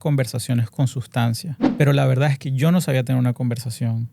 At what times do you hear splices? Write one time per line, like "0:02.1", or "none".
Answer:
0:01.6